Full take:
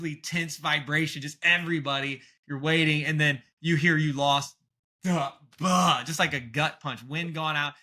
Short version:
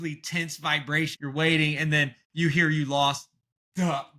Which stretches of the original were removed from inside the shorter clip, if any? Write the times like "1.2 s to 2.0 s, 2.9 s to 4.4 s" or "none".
1.2 s to 2.4 s